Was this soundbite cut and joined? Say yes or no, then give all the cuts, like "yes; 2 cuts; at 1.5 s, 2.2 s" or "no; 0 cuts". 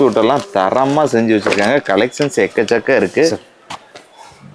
no; 0 cuts